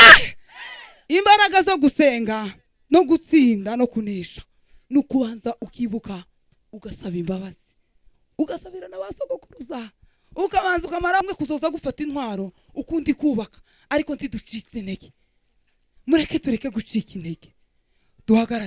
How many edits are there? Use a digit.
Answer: 1